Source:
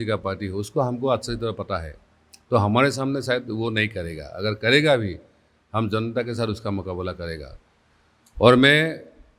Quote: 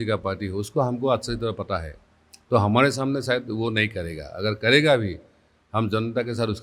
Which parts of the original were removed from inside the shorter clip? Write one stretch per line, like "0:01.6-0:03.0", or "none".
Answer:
none